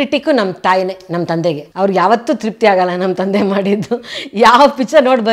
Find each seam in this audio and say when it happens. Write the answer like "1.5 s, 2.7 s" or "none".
1.7 s